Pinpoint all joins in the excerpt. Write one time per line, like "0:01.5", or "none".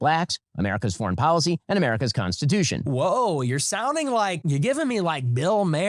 0:02.8
0:04.4